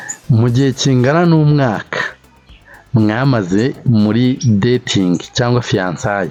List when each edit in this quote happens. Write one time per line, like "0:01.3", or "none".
none